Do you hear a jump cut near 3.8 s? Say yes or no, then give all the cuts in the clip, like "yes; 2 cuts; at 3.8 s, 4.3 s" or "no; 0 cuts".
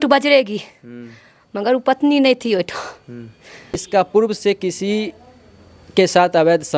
yes; 1 cut; at 3.8 s